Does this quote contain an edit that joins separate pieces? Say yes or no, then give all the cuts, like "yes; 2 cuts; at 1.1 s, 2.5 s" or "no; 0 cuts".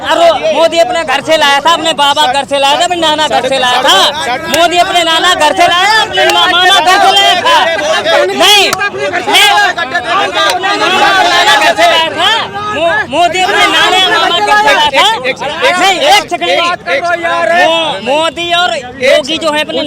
no; 0 cuts